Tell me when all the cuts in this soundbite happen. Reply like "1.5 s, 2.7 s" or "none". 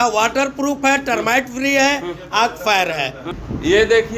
3.2 s